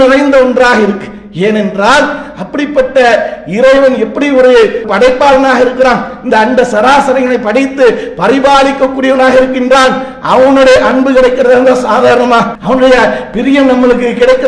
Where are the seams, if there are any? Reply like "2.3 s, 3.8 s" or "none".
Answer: 4.9 s, 12.6 s